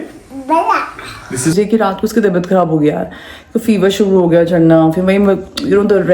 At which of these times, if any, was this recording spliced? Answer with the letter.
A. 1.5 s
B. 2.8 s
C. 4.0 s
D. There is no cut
A